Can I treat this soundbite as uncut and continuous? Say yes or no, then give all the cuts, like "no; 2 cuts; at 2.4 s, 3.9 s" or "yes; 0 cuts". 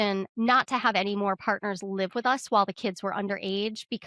yes; 0 cuts